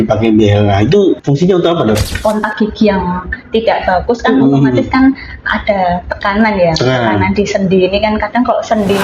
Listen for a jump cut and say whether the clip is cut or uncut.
cut